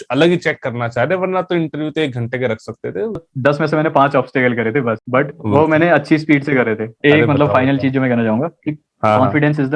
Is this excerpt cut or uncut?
cut